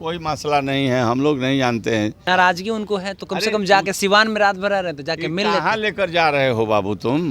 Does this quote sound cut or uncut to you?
cut